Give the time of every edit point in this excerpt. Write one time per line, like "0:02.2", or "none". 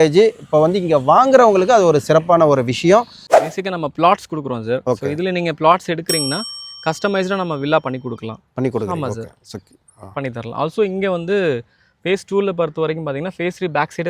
0:03.2